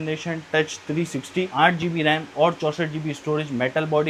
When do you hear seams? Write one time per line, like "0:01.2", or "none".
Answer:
none